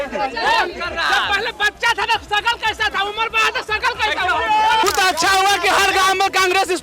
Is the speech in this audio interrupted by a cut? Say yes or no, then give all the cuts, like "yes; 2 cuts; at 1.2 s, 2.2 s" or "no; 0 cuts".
yes; 1 cut; at 4.8 s